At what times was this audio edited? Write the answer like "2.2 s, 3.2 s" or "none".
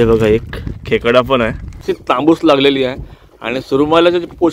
2.2 s